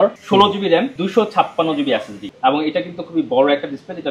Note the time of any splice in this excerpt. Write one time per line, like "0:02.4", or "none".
0:01.0
0:02.2